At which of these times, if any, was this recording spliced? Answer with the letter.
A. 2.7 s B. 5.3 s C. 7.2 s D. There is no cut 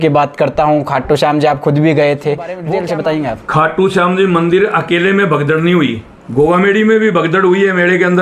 A